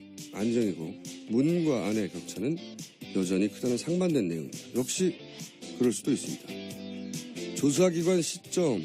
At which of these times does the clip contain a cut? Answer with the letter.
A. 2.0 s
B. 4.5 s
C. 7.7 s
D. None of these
B